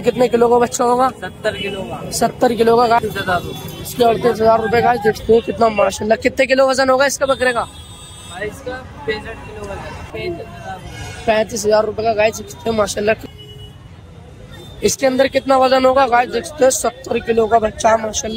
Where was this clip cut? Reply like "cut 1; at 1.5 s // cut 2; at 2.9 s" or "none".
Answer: cut 1; at 3.0 s // cut 2; at 5.2 s // cut 3; at 10.1 s // cut 4; at 13.3 s